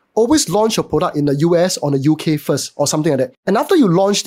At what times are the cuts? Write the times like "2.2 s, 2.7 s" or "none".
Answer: 3.4 s